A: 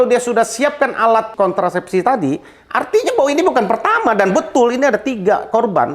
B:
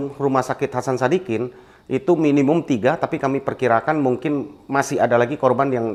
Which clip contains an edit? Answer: A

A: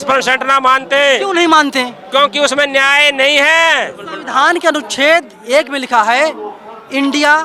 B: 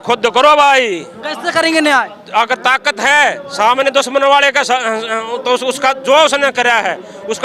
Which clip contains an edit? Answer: A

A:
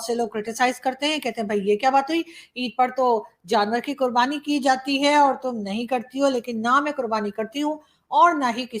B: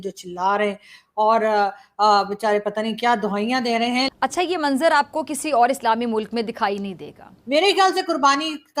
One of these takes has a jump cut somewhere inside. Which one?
B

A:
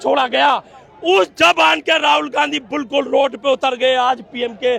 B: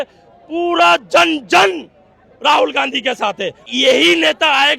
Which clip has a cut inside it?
B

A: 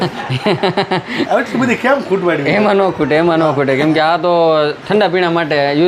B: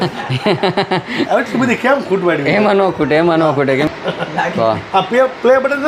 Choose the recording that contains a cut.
B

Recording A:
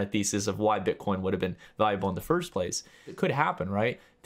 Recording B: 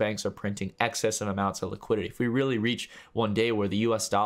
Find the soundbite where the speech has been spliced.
A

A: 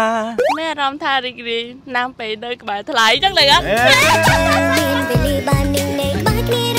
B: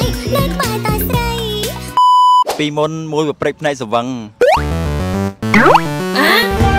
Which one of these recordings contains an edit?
B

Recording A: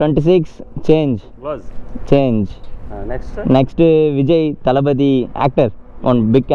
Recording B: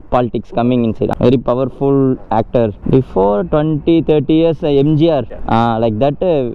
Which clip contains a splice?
B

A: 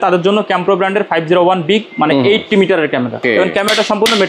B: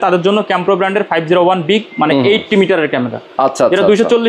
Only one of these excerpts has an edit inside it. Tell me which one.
A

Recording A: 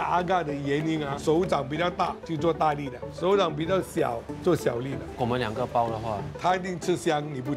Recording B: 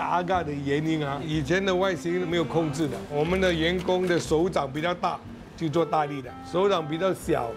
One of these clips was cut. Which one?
A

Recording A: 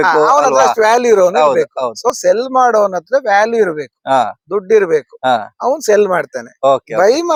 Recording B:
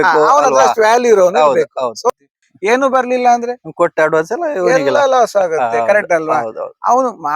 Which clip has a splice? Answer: B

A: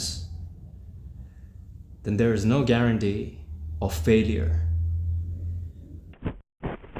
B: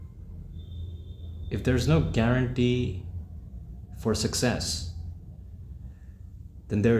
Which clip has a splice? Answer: A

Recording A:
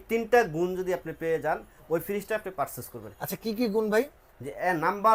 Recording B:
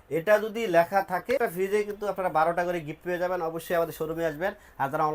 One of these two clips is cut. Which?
B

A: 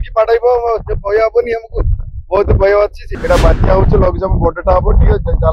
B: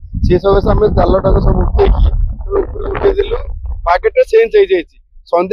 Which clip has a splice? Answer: A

